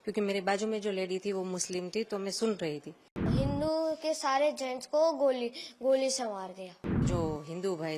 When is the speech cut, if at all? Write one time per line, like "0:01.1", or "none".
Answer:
0:03.3
0:07.1